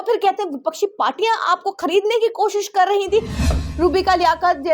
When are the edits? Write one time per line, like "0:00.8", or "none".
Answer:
0:03.5